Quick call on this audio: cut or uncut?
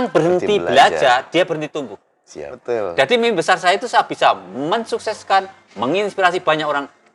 cut